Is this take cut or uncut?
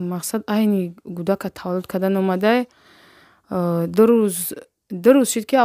uncut